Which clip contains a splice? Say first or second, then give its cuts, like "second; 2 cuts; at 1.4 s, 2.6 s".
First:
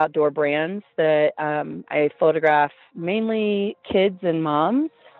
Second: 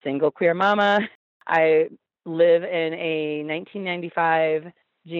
second; 1 cut; at 1.1 s